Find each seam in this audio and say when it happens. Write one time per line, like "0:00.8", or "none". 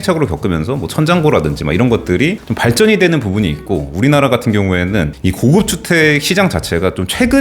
none